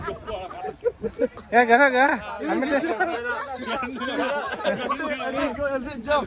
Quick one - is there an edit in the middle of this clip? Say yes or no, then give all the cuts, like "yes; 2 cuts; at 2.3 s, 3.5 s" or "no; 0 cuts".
yes; 1 cut; at 1.4 s